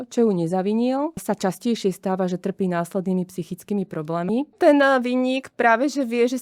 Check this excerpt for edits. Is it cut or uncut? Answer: cut